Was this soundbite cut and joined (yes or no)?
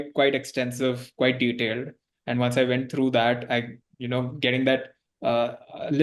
no